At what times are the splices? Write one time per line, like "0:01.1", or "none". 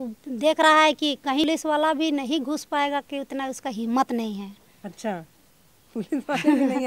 0:01.5